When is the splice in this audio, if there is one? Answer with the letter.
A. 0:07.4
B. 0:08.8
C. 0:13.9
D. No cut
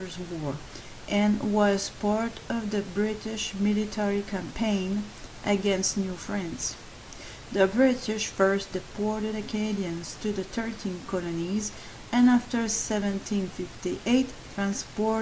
B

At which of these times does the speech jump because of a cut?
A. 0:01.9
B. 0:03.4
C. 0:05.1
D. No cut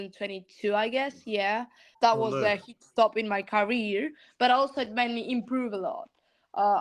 A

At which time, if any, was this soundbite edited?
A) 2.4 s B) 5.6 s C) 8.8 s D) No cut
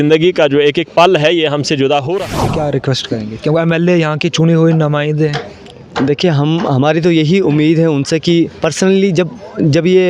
A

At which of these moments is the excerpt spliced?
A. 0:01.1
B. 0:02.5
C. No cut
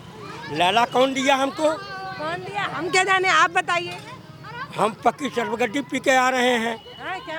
C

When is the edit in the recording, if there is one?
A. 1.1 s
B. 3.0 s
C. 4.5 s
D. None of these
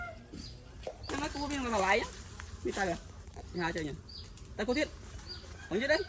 A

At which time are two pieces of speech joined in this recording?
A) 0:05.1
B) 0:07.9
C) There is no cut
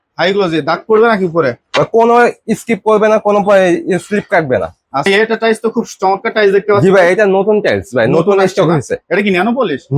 A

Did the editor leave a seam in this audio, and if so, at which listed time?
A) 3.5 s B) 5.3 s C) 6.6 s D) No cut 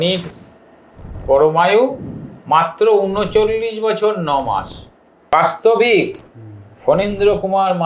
B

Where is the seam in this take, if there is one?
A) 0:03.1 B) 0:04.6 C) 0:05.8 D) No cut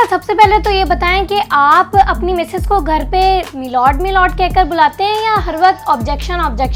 D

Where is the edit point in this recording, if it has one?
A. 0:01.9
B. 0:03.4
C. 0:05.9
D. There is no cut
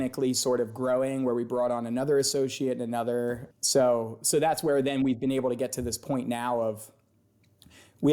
B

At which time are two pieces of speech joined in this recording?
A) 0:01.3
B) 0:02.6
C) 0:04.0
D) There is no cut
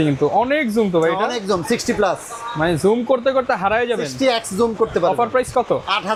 D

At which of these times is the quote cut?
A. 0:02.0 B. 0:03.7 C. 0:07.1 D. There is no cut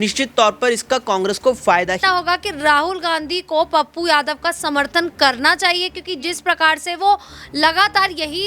A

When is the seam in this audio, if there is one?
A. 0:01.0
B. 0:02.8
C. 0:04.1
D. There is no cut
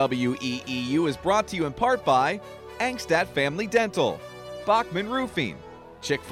D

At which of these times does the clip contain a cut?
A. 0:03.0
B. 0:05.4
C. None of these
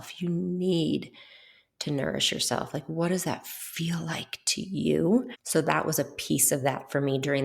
B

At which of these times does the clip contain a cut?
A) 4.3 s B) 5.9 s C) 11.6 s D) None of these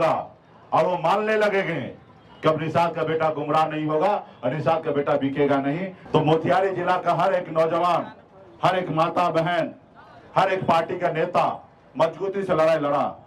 B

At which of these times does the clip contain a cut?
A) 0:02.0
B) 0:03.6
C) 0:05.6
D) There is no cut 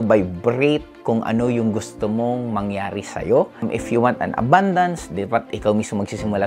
B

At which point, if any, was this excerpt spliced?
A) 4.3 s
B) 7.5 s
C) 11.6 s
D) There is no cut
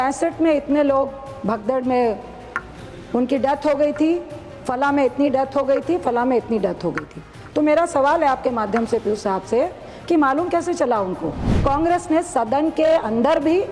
C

